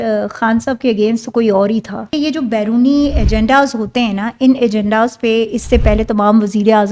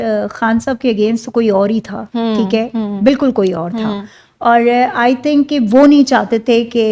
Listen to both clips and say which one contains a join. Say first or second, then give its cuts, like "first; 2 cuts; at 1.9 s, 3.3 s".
first; 1 cut; at 2.1 s